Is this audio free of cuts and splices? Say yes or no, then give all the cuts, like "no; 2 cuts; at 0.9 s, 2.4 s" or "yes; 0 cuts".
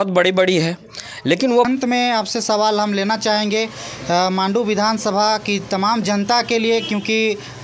no; 1 cut; at 1.7 s